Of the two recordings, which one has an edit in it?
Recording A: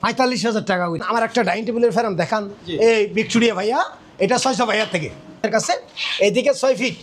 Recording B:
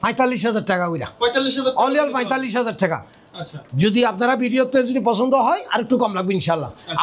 A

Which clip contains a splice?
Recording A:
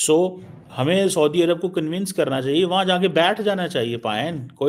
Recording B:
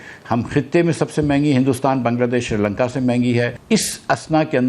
B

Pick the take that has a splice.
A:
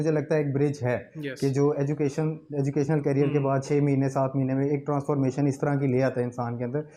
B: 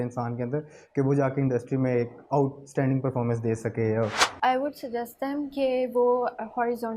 B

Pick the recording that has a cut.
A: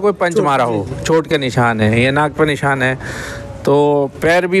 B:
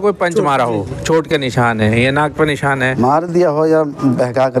B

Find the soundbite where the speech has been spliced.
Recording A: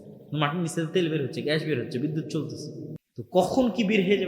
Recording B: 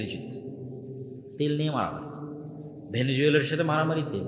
A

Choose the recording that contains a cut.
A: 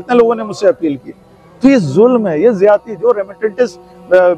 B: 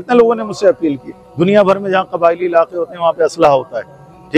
B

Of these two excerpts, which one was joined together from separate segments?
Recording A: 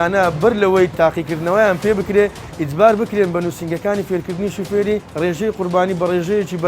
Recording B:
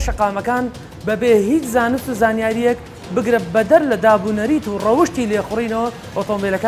A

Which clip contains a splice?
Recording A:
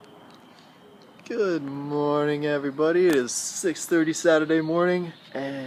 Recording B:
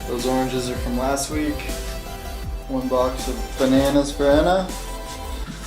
B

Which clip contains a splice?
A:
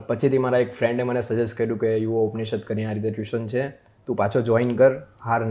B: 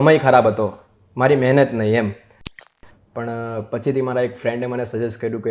B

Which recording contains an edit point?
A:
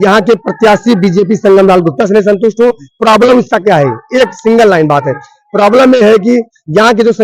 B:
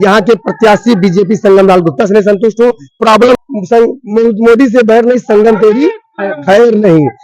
B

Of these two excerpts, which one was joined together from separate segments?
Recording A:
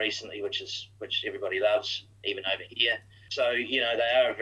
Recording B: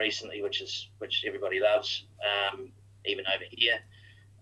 A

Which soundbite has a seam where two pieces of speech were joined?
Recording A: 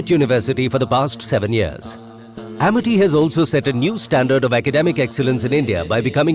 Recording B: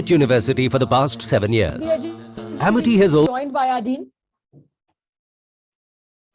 A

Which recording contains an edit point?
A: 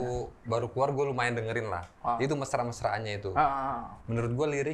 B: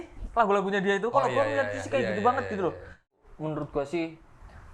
B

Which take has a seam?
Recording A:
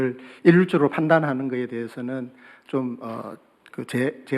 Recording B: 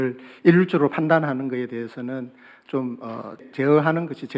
B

